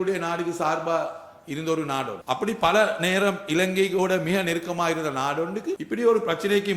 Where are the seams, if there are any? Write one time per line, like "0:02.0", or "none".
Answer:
0:02.2
0:05.8